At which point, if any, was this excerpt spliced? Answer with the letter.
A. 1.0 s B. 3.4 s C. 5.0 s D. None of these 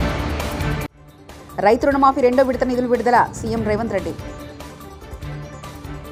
D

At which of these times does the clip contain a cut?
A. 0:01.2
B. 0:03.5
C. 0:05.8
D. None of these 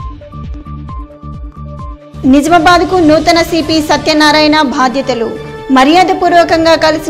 A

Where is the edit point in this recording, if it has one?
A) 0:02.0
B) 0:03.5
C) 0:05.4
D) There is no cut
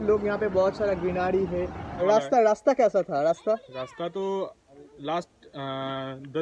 A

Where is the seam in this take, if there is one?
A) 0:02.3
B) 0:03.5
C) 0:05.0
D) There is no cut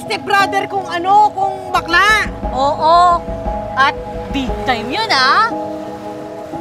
D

